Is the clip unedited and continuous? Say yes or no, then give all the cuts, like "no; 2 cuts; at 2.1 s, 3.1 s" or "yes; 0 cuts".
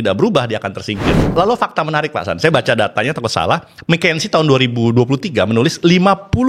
no; 1 cut; at 1.3 s